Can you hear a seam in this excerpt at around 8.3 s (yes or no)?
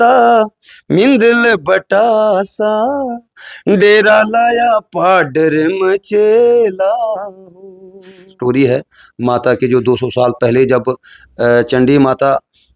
yes